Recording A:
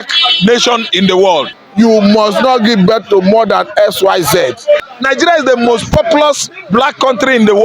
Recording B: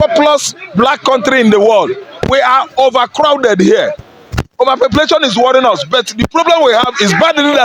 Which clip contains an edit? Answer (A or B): A